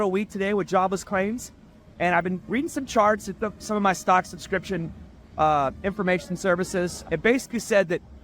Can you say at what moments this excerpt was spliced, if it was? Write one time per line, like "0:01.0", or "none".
0:07.0